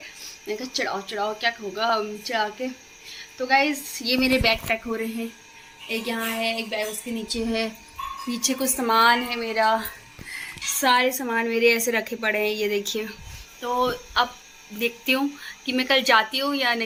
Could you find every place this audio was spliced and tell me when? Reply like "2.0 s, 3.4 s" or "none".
none